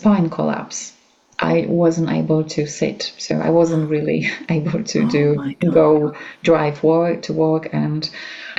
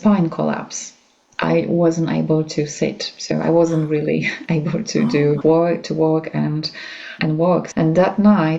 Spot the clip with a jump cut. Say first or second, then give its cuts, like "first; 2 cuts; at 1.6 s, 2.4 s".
second; 2 cuts; at 5.4 s, 7.1 s